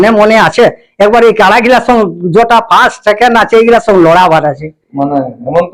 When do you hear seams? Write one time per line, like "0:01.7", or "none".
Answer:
none

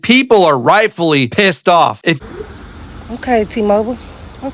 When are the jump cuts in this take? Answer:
0:02.2

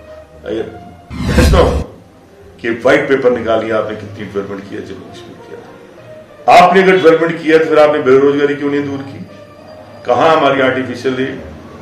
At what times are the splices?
none

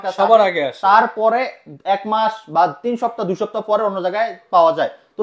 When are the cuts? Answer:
none

